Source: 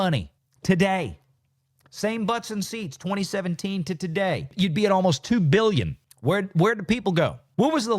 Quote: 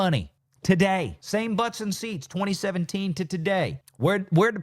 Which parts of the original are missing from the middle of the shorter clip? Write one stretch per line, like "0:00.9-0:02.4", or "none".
0:01.2-0:01.9
0:04.5-0:06.0